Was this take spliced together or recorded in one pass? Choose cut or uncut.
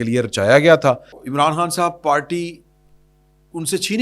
cut